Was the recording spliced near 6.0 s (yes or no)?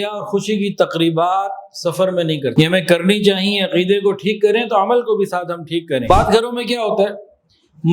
yes